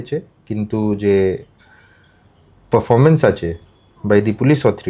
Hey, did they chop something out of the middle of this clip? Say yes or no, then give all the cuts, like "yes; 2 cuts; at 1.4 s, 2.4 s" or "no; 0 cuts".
no; 0 cuts